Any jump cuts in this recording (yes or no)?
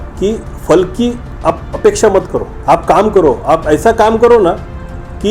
yes